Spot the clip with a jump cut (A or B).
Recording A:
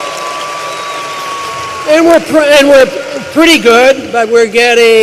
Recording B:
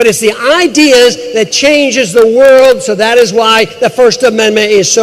B